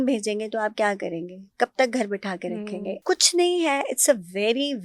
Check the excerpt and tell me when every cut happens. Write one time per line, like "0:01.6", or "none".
0:02.9